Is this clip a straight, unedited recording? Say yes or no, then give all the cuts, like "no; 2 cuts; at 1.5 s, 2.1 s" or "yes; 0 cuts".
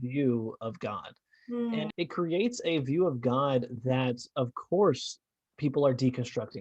no; 1 cut; at 1.9 s